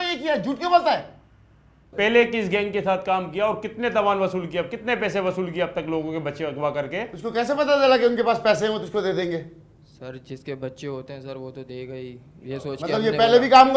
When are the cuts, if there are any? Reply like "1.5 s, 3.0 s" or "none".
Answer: 7.1 s